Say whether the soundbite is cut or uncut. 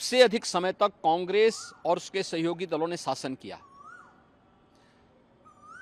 uncut